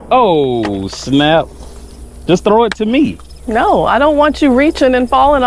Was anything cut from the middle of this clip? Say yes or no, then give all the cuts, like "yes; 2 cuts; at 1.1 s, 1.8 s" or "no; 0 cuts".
no; 0 cuts